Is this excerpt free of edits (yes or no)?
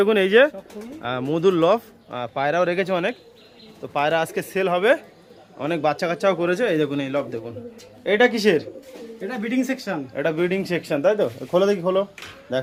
yes